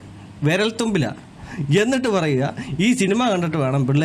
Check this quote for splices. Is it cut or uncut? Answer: uncut